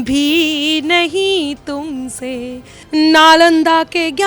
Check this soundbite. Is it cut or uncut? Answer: cut